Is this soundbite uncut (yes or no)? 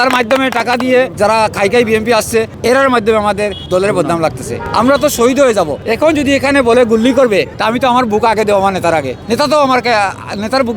no